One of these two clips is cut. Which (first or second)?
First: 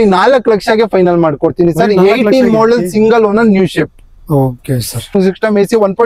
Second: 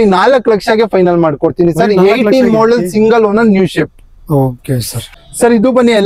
first